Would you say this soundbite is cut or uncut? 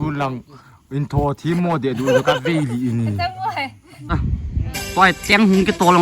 cut